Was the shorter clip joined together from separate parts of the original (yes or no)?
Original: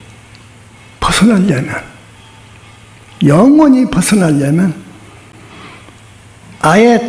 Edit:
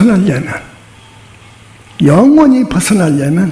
no